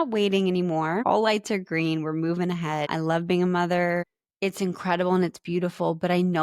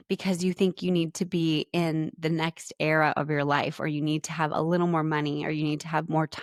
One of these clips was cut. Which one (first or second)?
first